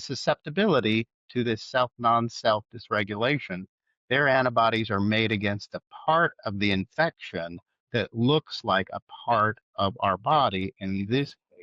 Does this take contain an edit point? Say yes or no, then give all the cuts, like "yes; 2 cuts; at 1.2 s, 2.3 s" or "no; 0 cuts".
no; 0 cuts